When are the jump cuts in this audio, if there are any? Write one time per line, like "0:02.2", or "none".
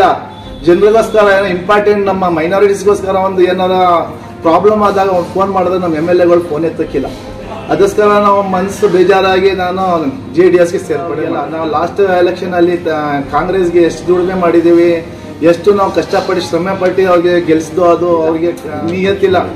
0:11.4
0:18.7